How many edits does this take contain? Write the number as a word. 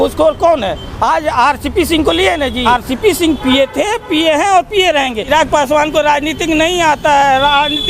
two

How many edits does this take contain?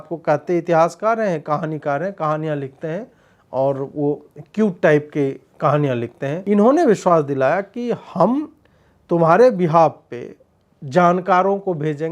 one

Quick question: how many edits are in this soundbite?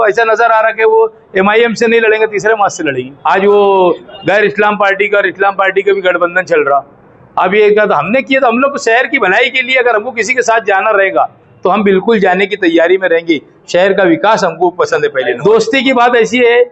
two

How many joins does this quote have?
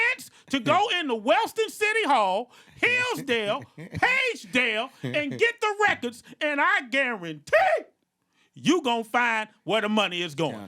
zero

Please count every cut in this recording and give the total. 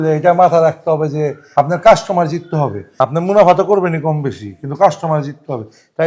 two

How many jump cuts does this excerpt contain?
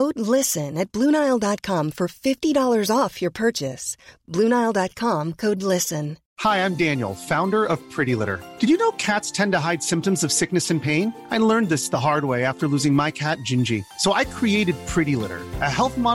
one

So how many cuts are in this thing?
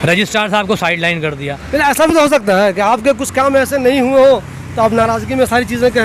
zero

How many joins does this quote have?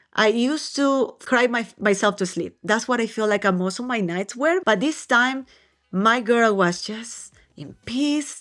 two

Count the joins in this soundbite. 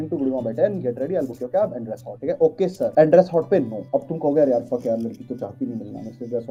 zero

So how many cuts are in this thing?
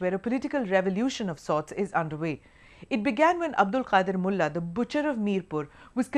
one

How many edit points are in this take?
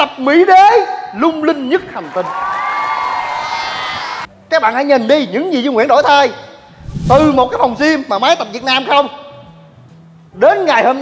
one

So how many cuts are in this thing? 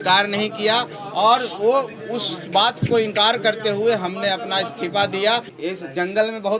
one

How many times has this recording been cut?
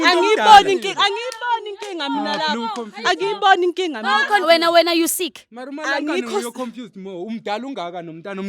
one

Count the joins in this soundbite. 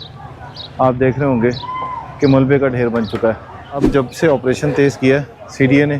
one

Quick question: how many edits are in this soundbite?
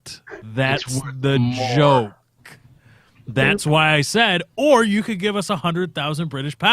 one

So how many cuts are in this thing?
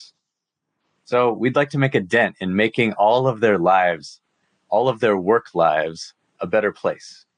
zero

